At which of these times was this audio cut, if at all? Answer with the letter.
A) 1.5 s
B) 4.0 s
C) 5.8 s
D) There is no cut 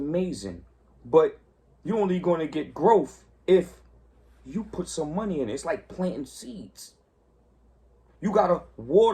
D